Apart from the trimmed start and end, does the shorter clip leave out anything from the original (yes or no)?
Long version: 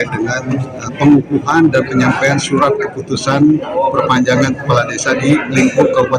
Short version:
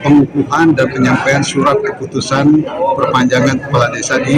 no